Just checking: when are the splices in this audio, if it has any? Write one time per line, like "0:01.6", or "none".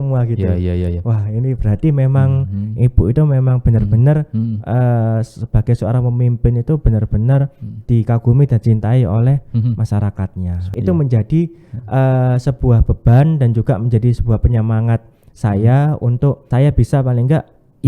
0:10.6
0:16.5